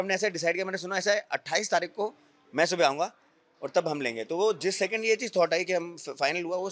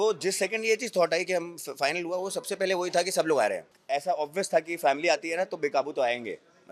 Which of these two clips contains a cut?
second; 1 cut; at 3.7 s

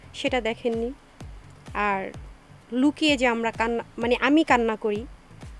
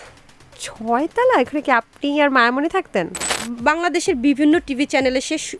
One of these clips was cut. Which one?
second; 1 cut; at 3.2 s

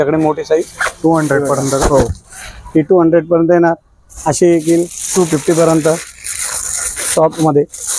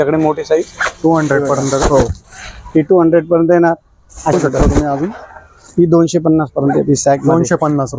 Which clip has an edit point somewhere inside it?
second; 1 cut; at 4.3 s

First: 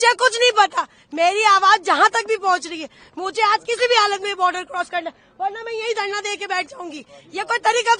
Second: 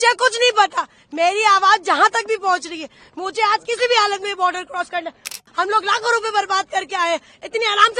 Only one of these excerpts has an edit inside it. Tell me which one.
second; 1 cut; at 5.4 s

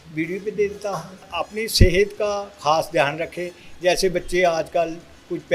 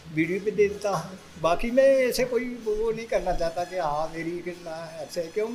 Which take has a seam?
first; 1 cut; at 1.3 s

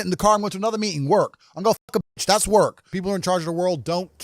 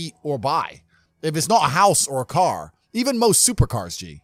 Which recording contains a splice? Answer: first; 1 cut; at 2.9 s

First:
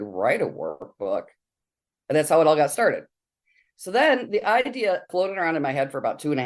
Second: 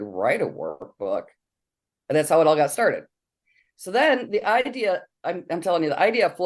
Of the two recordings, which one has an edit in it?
first; 1 cut; at 5.1 s

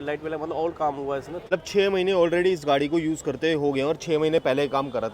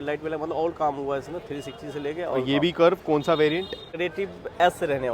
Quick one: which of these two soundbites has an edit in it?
first; 1 cut; at 1.5 s

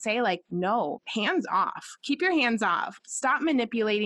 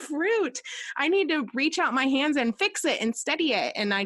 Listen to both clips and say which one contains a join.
first; 2 cuts; at 0.8 s, 2.9 s

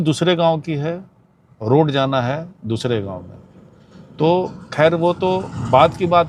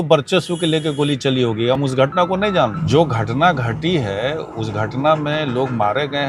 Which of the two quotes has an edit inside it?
second; 1 cut; at 2.8 s

